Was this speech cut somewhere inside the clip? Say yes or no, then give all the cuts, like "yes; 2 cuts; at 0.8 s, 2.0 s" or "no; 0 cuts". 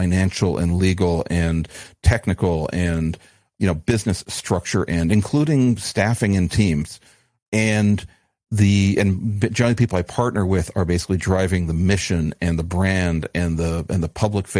yes; 2 cuts; at 3.4 s, 7.1 s